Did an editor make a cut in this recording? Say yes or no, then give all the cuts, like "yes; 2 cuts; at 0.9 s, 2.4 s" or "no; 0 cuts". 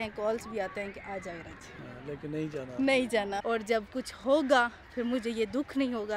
yes; 1 cut; at 3.4 s